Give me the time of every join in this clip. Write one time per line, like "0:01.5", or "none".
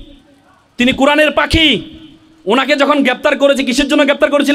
none